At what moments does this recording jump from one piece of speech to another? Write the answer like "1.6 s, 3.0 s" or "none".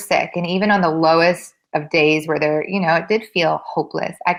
none